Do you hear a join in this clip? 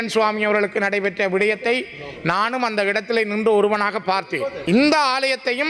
yes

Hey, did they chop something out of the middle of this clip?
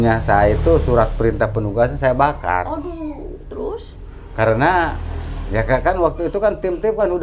no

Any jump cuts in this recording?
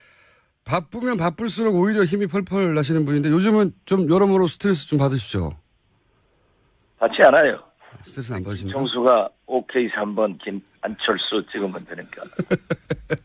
no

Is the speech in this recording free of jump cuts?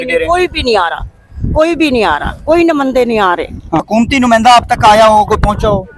no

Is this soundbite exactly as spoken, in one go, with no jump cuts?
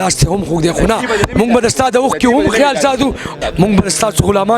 no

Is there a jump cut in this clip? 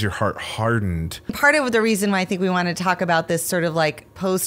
yes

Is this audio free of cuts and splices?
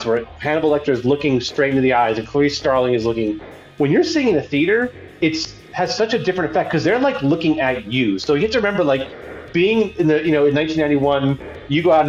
yes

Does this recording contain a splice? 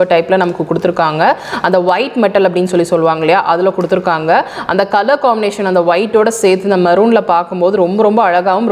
no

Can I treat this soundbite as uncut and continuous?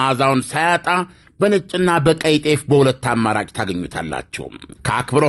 yes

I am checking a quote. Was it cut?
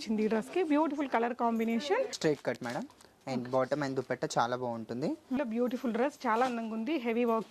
yes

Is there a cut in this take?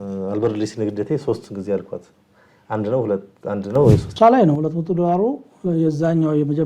yes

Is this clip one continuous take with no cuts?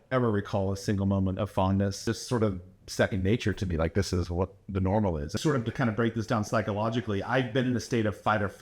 no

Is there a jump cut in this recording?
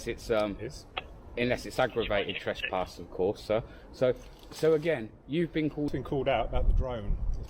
yes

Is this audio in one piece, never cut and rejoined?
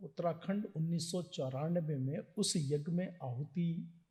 yes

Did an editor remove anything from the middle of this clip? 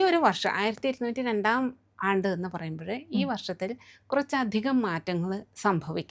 no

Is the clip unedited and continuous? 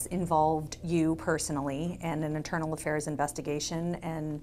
yes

